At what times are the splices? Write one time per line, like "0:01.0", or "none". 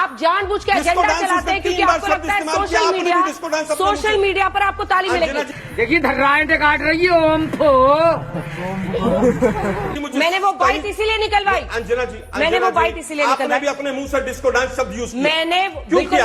none